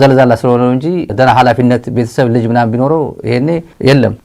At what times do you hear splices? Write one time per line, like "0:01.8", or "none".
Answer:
none